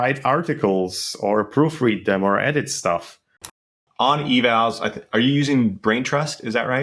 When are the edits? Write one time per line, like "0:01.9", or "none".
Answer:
0:03.7